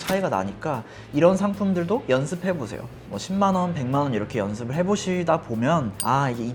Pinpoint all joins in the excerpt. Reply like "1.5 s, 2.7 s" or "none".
3.1 s